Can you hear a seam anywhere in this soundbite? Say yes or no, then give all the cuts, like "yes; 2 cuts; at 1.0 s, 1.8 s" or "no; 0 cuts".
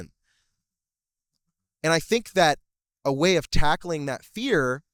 no; 0 cuts